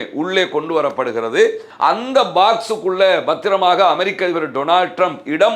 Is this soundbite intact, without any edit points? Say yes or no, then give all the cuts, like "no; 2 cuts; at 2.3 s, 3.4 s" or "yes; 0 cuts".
no; 1 cut; at 1.6 s